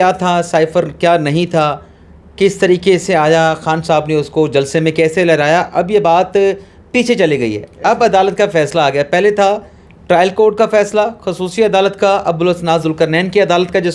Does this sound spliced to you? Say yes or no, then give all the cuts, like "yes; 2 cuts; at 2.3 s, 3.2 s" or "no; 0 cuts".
no; 0 cuts